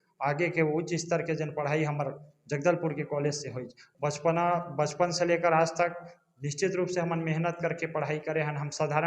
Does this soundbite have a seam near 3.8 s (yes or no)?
yes